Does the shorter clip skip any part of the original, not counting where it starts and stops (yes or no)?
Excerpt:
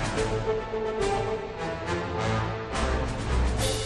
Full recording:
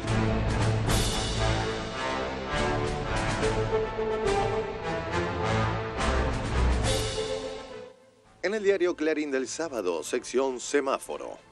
no